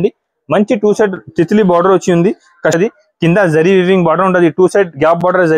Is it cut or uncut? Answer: cut